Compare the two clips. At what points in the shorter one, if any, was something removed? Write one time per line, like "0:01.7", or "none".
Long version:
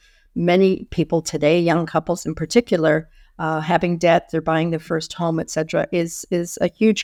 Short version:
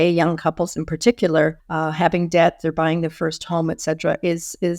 0:01.7